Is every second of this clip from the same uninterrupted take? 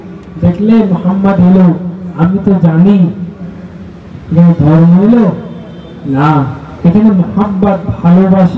yes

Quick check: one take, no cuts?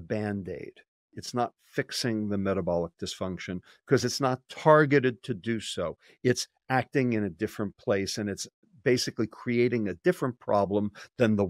no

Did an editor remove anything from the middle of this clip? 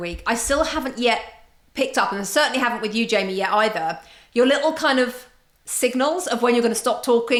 no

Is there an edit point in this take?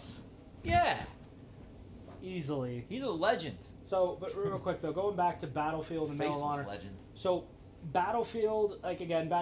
no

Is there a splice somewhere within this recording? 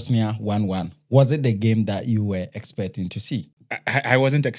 yes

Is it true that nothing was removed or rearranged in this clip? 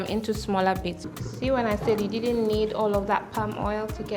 no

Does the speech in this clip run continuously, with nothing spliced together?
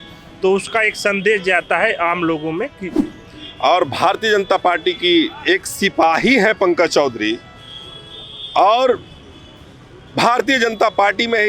no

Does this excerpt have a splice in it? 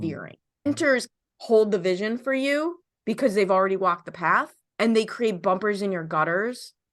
yes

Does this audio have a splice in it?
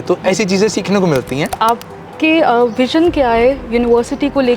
yes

